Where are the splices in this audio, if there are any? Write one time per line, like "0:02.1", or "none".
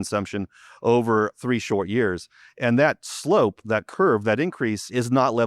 none